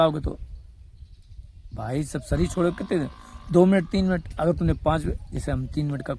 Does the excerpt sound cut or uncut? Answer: uncut